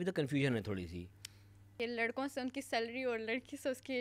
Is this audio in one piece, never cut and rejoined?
no; 1 cut; at 1.7 s

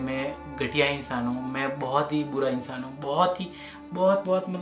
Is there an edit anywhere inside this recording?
no; 0 cuts

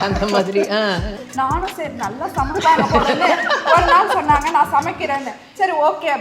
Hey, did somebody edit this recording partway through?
yes; 1 cut; at 1.2 s

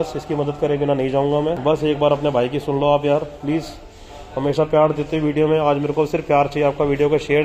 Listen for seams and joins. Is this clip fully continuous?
no; 1 cut; at 1.6 s

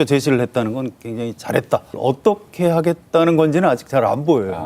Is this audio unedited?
no; 1 cut; at 2.0 s

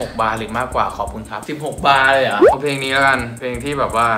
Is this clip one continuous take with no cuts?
no; 1 cut; at 2.6 s

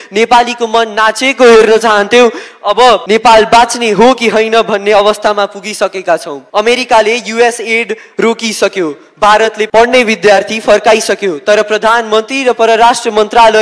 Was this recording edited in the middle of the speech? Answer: yes; 3 cuts; at 3.0 s, 6.4 s, 9.7 s

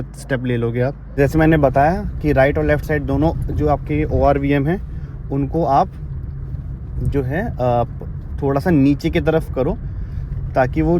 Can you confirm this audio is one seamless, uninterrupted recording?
no; 1 cut; at 1.2 s

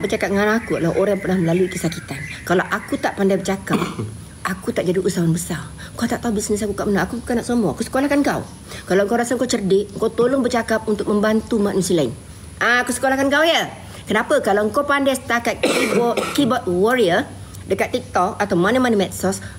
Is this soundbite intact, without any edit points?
yes; 0 cuts

